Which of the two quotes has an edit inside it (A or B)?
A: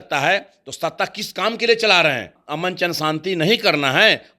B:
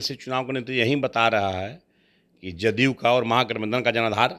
A